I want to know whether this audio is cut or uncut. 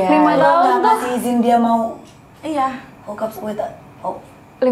uncut